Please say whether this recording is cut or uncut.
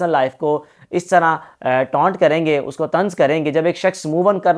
uncut